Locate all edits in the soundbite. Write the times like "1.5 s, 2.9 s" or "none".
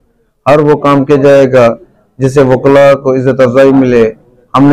none